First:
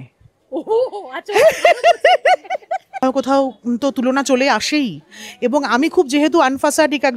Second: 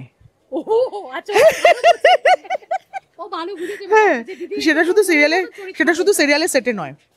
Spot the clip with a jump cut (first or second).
first